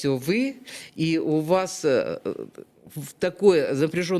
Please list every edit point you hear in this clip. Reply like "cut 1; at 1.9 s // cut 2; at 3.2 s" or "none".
none